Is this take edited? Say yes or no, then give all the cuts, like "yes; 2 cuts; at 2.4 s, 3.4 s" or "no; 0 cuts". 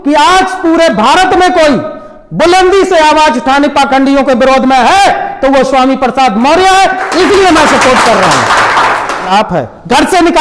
yes; 1 cut; at 9.3 s